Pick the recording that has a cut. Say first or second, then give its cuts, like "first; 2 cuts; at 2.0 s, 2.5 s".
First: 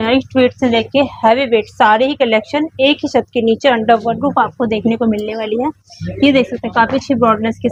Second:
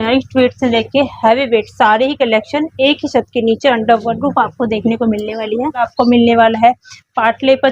second; 1 cut; at 5.9 s